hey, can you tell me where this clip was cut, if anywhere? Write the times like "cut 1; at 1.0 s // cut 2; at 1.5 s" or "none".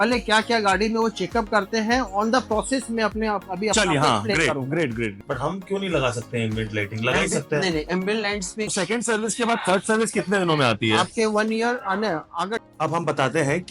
cut 1; at 5.1 s // cut 2; at 8.7 s // cut 3; at 12.6 s